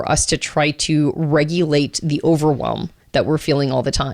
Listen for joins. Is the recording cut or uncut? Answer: uncut